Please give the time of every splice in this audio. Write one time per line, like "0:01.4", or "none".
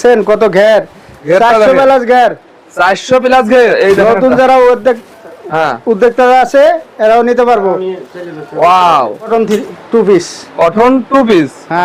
0:03.8
0:09.2